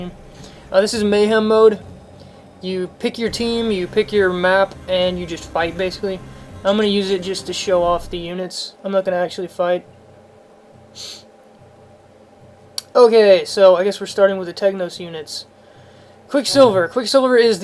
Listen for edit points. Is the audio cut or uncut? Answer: cut